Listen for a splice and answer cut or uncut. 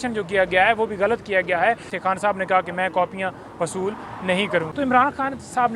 cut